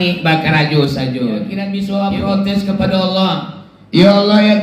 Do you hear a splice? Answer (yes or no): yes